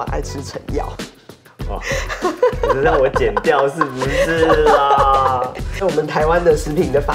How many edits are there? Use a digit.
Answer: 1